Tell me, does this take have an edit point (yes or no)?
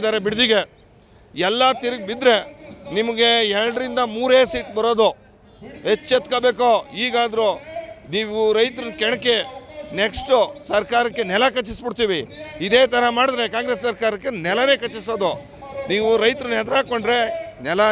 no